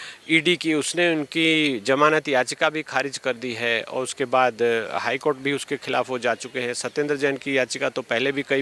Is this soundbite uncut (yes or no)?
yes